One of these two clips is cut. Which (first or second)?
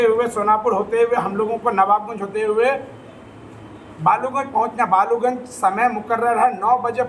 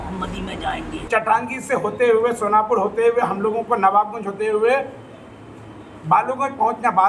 second